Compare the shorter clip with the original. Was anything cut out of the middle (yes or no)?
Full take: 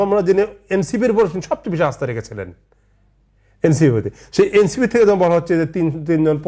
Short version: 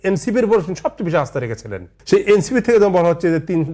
yes